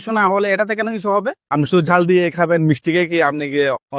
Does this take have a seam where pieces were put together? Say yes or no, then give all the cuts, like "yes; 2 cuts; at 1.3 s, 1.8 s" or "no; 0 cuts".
yes; 1 cut; at 1.7 s